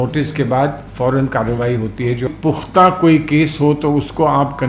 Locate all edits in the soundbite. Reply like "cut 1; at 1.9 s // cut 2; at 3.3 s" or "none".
cut 1; at 2.3 s

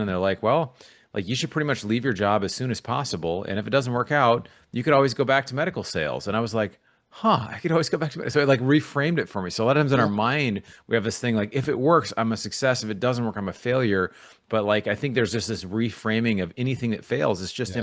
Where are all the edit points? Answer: none

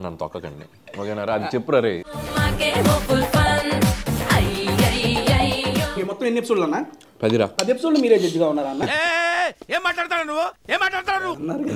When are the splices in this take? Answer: cut 1; at 2.1 s // cut 2; at 6.0 s // cut 3; at 7.6 s

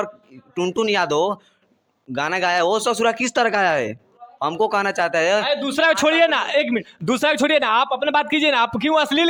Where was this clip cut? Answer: none

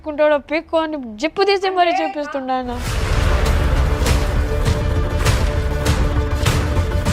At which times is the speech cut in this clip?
cut 1; at 2.9 s

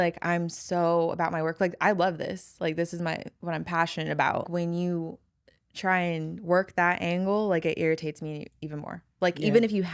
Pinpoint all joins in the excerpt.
cut 1; at 4.5 s

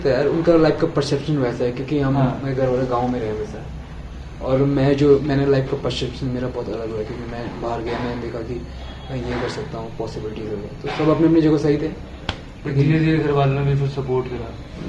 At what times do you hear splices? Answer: none

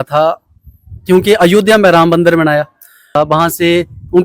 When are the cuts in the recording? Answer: cut 1; at 3.1 s

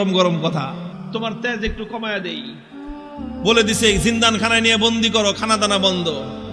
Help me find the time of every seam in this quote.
cut 1; at 0.9 s

